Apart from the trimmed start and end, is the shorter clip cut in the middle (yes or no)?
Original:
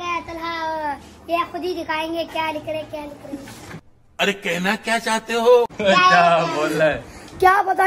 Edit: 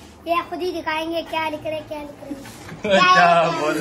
yes